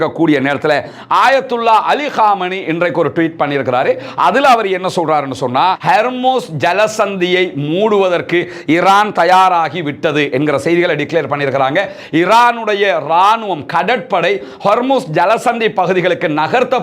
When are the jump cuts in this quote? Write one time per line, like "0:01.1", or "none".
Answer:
0:05.8